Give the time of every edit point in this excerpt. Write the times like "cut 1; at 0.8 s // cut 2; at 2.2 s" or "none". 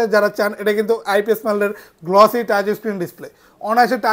none